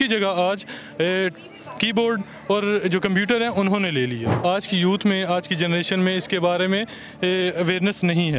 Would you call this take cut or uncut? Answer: cut